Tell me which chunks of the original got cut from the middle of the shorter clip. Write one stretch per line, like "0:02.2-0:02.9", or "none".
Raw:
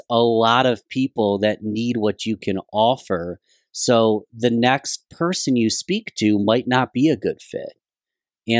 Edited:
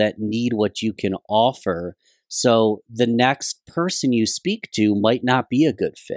none